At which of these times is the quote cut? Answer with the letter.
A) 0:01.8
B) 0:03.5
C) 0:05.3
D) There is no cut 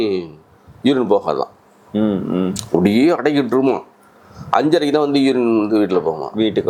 D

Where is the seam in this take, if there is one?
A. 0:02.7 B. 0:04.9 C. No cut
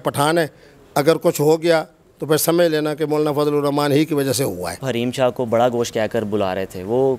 B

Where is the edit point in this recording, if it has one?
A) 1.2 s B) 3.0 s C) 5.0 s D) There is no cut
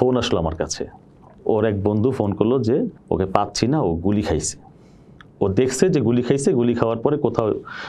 B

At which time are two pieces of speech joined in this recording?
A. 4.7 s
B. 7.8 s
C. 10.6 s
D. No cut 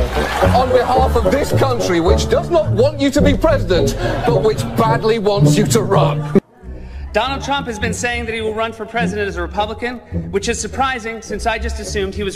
A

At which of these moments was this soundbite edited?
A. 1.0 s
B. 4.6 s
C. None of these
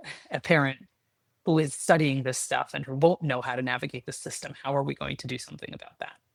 C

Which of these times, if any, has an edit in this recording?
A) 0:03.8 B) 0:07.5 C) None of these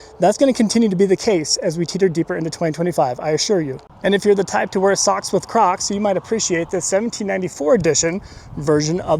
A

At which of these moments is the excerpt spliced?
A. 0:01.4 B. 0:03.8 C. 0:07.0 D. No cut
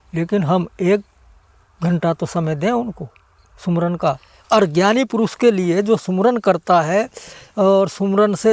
D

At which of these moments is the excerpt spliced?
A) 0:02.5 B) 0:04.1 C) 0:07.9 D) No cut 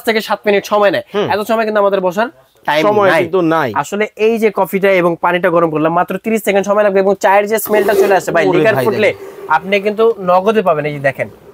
D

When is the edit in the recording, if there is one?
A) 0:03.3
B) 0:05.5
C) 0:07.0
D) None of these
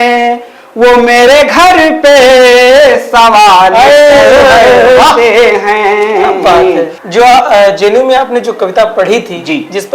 C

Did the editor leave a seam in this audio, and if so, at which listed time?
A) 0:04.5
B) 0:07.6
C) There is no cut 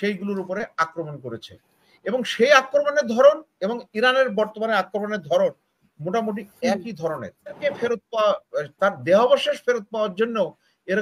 B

